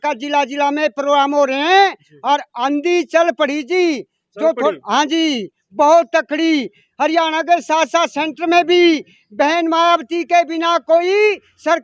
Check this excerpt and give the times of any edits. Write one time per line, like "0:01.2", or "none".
none